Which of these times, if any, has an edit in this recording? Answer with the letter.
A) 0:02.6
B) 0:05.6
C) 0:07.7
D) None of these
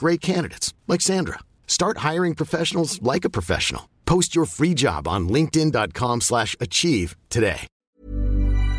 C